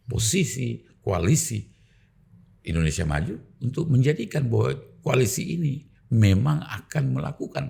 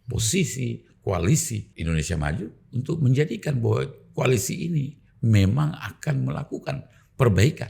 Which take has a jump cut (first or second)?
second